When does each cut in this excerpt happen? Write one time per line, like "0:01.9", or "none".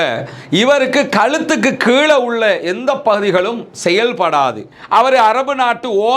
0:04.7